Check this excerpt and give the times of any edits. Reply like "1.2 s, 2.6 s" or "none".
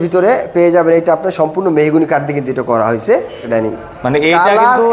3.4 s